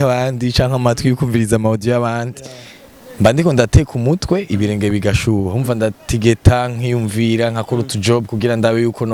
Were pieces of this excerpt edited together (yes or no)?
no